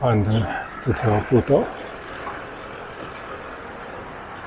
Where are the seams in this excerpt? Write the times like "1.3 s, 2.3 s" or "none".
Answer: none